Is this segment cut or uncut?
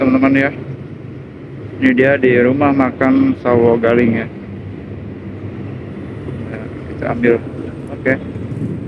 uncut